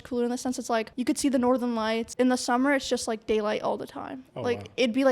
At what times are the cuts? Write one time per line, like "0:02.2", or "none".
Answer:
0:00.9
0:02.1